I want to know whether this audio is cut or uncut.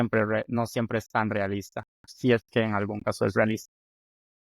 cut